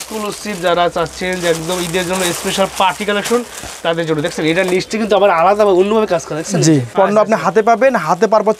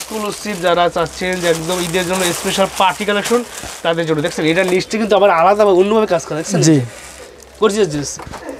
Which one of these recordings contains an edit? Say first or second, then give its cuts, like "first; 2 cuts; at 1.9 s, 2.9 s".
first; 1 cut; at 6.9 s